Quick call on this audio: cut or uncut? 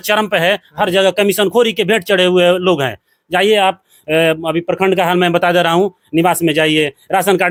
uncut